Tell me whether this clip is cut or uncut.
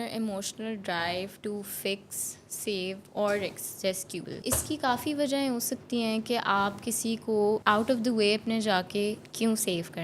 cut